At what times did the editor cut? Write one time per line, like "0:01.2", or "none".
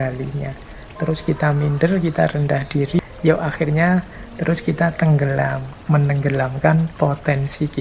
0:03.0
0:05.7